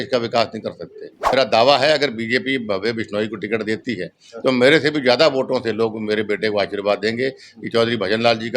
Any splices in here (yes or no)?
yes